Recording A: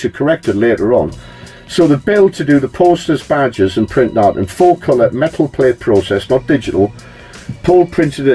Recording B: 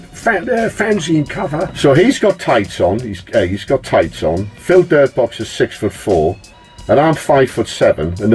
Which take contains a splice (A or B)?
B